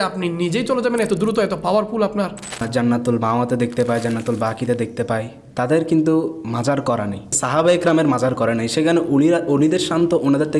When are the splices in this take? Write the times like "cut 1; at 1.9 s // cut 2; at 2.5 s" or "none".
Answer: cut 1; at 2.6 s // cut 2; at 7.4 s